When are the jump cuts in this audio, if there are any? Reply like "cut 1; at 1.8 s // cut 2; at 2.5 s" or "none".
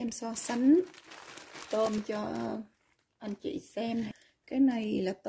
cut 1; at 4.1 s